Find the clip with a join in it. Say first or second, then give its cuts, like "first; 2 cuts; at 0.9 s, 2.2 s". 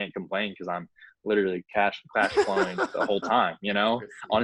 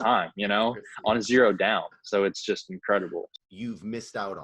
second; 1 cut; at 3.3 s